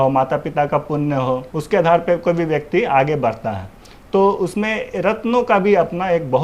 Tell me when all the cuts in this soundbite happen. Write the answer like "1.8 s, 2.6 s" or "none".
1.5 s